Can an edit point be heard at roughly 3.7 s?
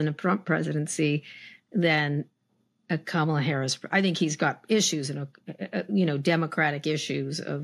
no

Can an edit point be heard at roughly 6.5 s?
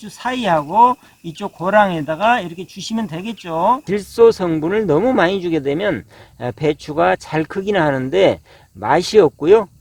no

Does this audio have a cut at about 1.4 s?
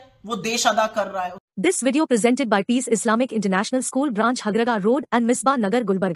yes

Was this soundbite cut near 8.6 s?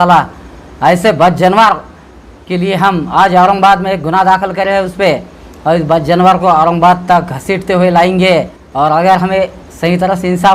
yes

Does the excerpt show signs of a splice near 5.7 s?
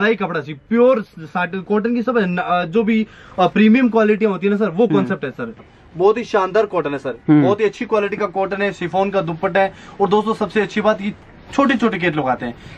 yes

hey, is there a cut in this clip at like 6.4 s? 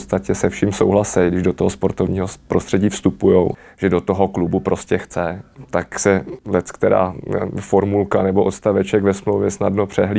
yes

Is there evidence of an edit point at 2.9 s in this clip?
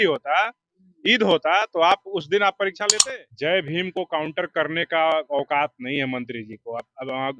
yes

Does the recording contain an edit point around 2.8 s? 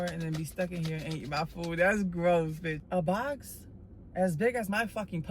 yes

